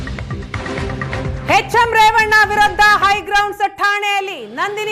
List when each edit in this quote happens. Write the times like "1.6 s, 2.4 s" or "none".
none